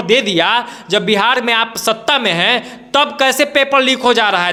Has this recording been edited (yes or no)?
no